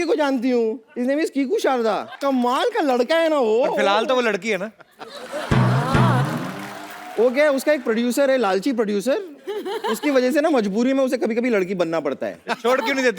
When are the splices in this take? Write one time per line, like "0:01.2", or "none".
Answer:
0:00.9
0:02.1